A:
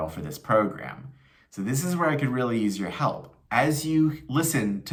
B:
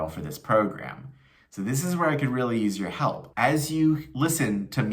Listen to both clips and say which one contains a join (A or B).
B